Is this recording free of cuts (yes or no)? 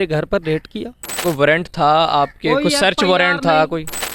no